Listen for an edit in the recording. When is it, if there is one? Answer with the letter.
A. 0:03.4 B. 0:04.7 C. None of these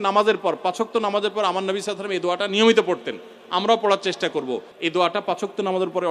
B